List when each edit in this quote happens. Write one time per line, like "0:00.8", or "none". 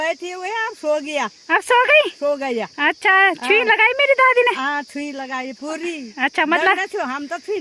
none

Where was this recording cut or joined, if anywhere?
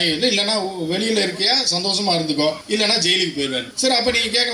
0:02.6
0:03.7

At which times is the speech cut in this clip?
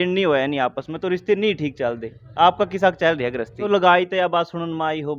0:03.6

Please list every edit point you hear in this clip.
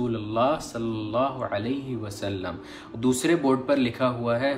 none

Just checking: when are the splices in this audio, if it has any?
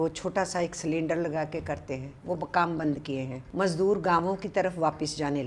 0:03.4

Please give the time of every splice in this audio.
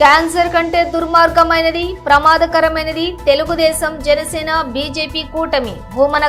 none

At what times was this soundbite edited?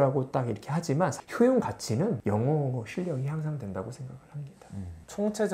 none

